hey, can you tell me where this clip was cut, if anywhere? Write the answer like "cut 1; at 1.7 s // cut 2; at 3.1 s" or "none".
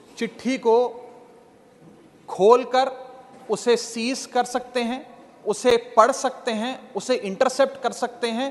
none

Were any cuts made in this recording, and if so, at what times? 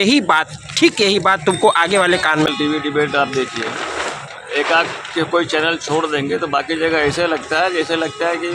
cut 1; at 2.5 s

